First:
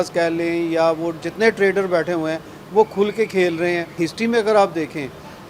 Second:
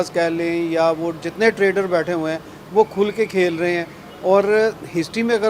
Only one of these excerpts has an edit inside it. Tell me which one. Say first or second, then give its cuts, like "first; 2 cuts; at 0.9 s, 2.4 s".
first; 1 cut; at 3.9 s